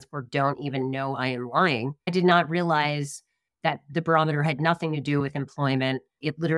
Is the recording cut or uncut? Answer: cut